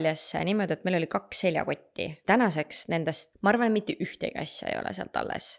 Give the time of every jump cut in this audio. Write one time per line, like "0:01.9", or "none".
0:02.1
0:03.3